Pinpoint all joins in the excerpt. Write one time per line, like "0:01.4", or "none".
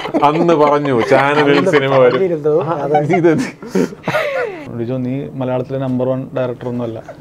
0:04.7